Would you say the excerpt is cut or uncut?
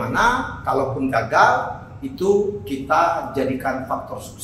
uncut